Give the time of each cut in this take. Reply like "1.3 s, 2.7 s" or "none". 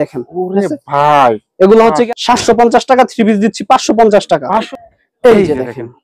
2.1 s, 4.6 s